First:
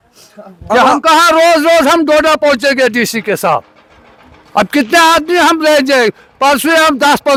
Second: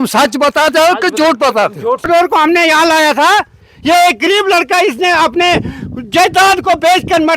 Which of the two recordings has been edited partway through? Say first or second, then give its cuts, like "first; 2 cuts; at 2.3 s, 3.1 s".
second; 1 cut; at 2.1 s